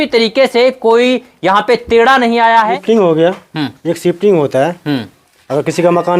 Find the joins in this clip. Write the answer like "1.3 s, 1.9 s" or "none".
2.8 s